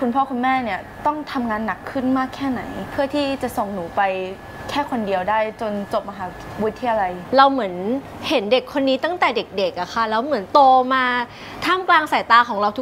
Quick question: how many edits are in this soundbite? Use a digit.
2